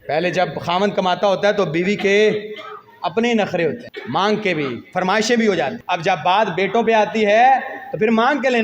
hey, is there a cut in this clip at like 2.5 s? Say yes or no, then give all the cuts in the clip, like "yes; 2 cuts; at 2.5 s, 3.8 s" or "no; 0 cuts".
no; 2 cuts; at 3.9 s, 5.8 s